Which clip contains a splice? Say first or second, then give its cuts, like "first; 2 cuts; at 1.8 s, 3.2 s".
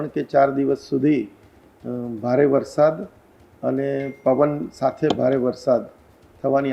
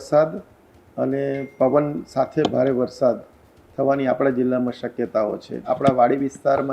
second; 1 cut; at 5.6 s